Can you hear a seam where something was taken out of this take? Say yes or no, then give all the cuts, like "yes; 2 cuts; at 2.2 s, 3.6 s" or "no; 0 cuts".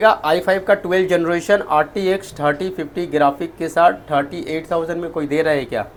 no; 0 cuts